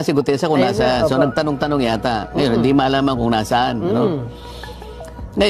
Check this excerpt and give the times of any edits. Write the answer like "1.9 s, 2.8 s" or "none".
none